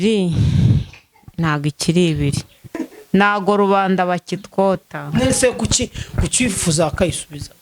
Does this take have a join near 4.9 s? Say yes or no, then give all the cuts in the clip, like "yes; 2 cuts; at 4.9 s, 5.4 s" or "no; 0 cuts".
no; 1 cut; at 2.7 s